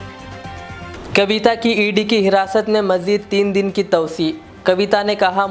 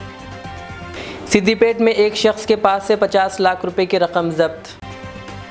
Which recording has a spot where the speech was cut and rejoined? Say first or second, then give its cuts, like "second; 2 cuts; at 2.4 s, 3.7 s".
first; 1 cut; at 0.9 s